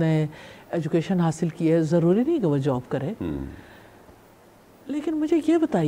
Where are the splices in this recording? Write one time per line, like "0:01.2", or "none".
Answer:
none